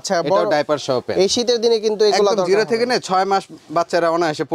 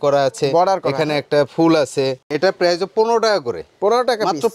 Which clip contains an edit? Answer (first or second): second